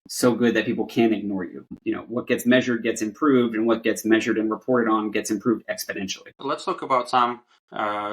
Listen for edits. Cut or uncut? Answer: cut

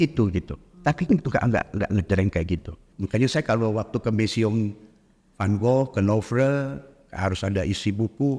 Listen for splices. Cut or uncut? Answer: cut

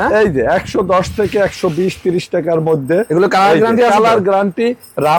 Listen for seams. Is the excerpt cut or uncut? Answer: uncut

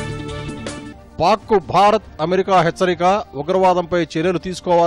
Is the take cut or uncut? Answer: cut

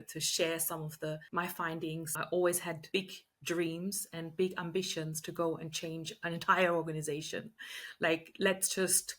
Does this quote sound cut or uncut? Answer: cut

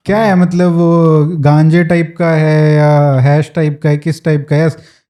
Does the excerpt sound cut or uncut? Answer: uncut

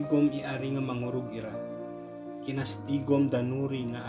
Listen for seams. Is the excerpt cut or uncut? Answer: cut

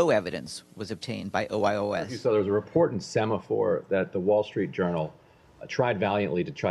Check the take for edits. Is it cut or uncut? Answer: cut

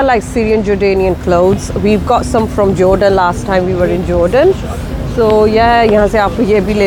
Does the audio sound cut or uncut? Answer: uncut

